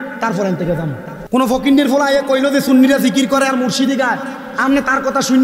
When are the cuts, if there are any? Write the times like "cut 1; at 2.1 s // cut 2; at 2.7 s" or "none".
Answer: cut 1; at 1.1 s